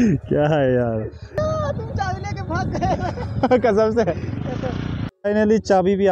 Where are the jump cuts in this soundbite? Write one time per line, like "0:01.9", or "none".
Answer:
0:01.3
0:05.1